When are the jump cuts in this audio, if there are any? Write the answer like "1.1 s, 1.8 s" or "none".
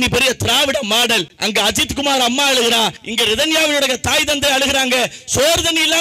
1.3 s, 3.0 s